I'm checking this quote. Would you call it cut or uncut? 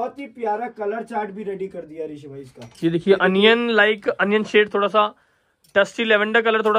uncut